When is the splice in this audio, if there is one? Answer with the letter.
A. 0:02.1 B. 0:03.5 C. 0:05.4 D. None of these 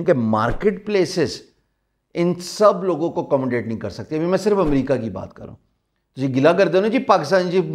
D